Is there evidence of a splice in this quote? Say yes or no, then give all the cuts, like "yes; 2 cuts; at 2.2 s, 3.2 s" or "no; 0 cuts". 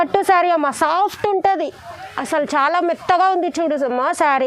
no; 0 cuts